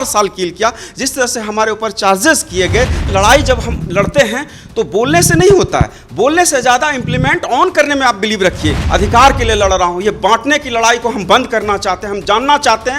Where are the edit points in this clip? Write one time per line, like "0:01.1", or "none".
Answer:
0:03.1
0:08.8